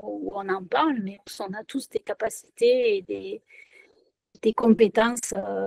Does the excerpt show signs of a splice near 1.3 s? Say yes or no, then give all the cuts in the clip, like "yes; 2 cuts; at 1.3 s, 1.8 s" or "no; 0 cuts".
yes; 1 cut; at 1.3 s